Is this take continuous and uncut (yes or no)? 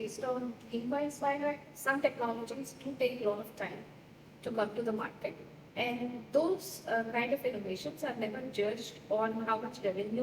no